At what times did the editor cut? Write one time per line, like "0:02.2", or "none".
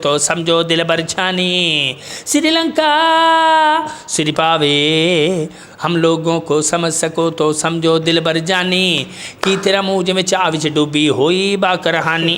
none